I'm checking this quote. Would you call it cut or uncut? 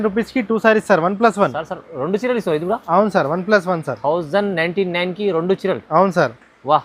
uncut